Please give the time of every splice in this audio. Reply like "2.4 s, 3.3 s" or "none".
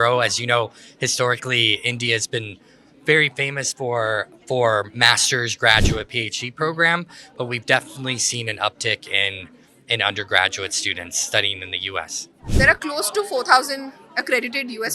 12.5 s